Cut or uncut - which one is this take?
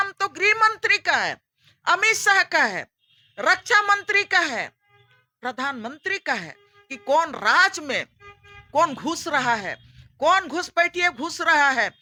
uncut